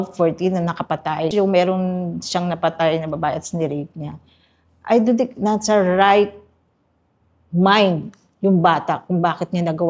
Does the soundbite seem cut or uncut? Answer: cut